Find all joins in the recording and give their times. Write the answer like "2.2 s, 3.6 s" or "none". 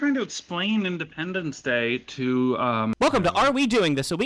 3.0 s